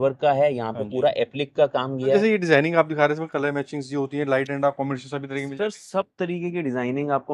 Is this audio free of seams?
no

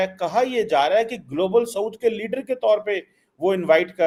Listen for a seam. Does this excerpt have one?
no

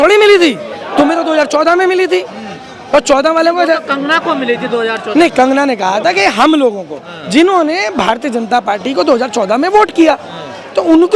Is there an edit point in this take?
no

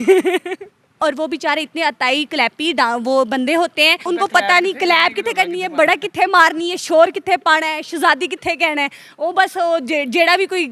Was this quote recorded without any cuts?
no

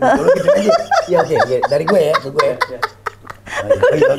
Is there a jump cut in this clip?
no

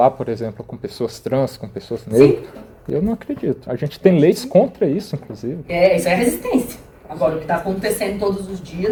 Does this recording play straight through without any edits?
yes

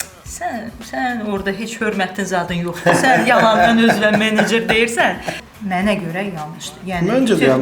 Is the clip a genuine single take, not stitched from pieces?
no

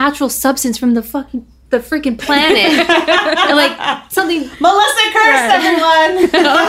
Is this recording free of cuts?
yes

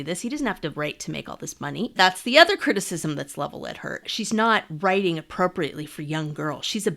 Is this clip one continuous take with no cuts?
no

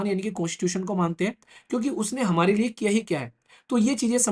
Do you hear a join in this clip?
no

